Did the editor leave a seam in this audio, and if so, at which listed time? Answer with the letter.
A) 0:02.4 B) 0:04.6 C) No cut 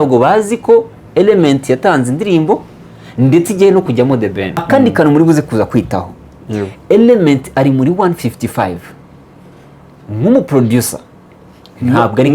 B